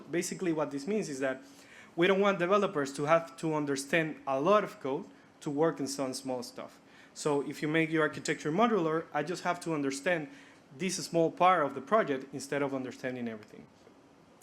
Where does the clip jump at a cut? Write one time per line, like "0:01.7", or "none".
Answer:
none